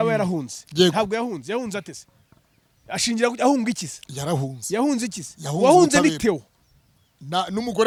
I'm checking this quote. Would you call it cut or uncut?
uncut